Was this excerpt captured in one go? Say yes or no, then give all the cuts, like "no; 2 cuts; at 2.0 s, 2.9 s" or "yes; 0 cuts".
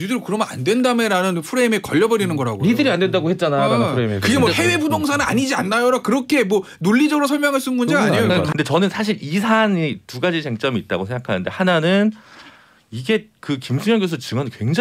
no; 1 cut; at 8.5 s